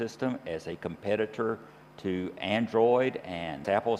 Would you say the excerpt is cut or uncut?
uncut